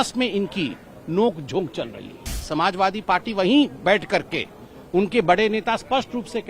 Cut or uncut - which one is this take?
cut